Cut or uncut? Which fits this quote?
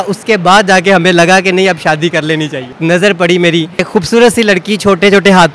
cut